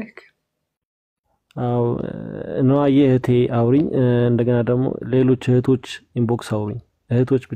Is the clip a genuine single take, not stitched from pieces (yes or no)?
yes